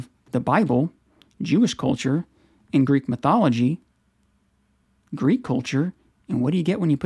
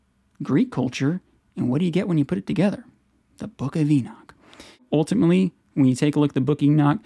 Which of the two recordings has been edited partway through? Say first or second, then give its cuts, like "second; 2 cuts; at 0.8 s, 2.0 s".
second; 1 cut; at 4.8 s